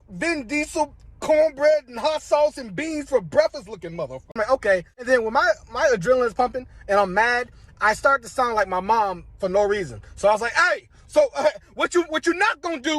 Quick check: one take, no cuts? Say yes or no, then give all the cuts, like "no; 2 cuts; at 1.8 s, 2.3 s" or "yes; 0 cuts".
no; 1 cut; at 4.3 s